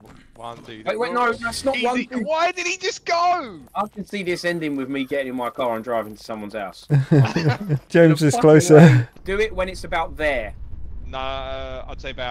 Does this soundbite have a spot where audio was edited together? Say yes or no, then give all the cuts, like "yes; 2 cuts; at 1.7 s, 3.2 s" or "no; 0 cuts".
yes; 1 cut; at 9.1 s